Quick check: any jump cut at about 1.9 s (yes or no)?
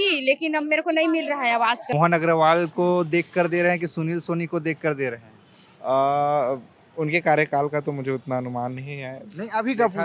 yes